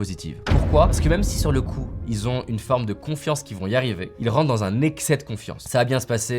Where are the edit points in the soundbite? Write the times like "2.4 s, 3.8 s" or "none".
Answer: 4.1 s